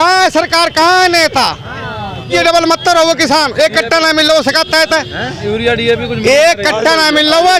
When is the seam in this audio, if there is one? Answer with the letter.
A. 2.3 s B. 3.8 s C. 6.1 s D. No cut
A